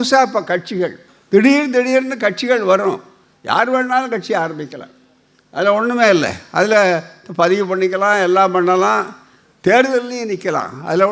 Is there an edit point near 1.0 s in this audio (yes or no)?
yes